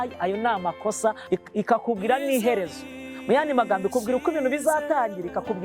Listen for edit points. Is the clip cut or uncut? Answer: cut